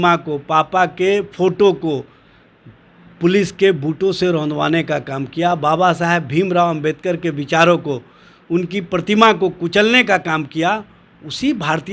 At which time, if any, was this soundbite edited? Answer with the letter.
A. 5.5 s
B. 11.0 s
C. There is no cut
C